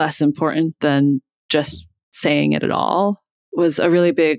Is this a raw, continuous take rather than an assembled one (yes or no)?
no